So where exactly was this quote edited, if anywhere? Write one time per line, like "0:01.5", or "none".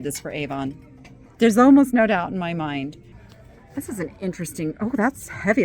0:03.1